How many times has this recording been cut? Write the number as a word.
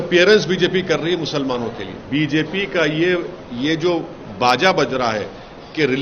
one